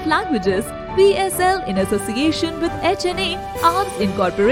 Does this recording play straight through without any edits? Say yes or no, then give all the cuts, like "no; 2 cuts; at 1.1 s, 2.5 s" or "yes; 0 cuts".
yes; 0 cuts